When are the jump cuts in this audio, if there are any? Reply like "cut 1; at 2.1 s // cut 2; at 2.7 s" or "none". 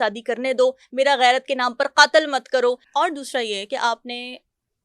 cut 1; at 2.8 s